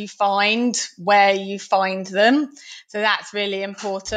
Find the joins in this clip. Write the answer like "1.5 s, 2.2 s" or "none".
none